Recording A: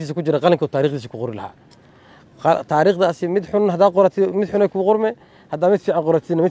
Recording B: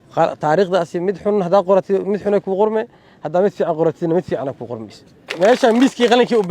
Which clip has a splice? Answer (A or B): B